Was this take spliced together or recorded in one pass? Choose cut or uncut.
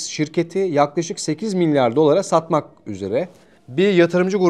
uncut